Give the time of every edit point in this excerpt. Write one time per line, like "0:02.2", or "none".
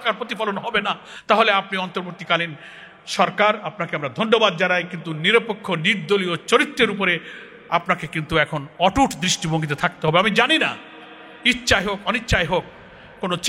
none